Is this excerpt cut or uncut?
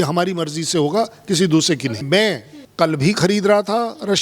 cut